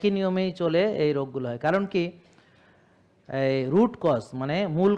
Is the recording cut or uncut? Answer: uncut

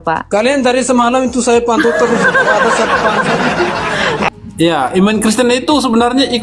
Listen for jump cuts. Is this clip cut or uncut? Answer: cut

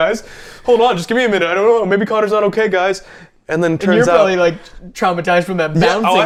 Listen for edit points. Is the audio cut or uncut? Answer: uncut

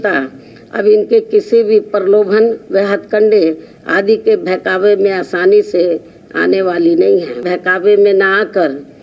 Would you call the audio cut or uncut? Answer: cut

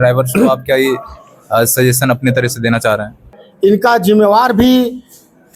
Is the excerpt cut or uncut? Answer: cut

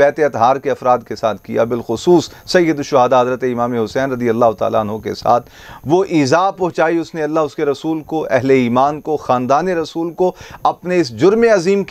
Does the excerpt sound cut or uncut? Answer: uncut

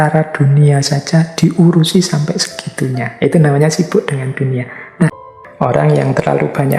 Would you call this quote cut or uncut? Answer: cut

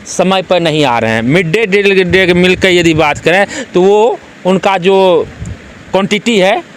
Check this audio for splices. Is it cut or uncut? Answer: uncut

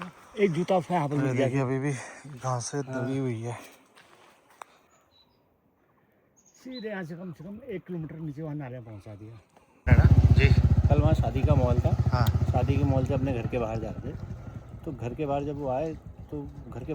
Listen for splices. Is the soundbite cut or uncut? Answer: cut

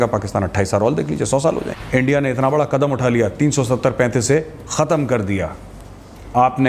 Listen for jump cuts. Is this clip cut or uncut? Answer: cut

